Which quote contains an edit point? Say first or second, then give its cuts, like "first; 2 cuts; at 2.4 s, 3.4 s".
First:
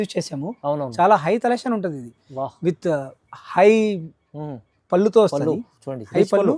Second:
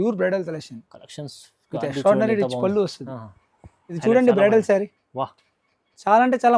second; 1 cut; at 4.0 s